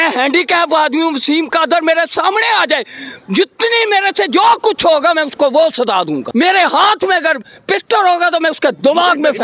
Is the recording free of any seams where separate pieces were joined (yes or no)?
no